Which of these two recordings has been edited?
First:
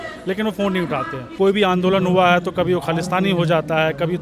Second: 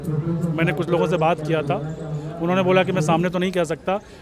first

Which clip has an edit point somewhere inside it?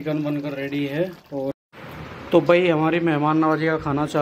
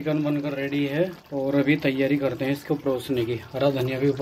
first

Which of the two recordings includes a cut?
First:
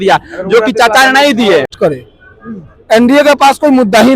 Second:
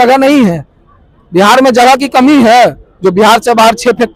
first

